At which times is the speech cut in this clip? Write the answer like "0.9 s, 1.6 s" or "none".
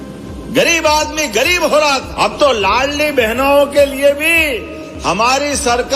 2.1 s

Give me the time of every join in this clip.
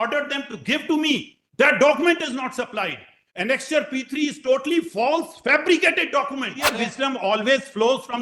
6.8 s

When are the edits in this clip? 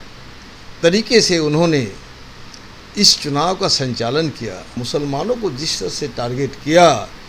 4.7 s

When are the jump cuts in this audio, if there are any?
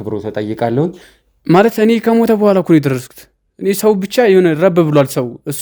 1.1 s

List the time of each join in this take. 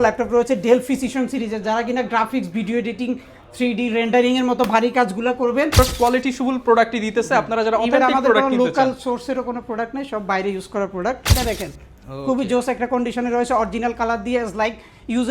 5.8 s, 11.3 s

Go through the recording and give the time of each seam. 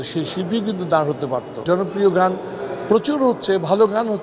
1.6 s

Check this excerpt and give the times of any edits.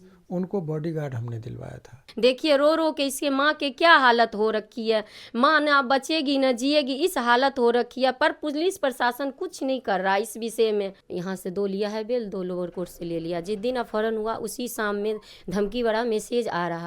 2.0 s, 11.0 s

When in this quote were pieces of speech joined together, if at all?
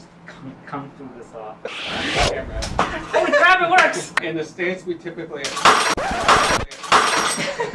1.7 s, 4.2 s

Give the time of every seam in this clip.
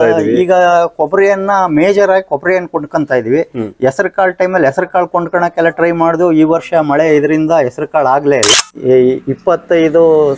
8.5 s

